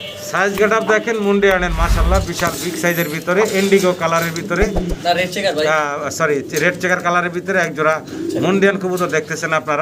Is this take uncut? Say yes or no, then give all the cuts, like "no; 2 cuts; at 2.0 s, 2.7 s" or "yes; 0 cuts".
yes; 0 cuts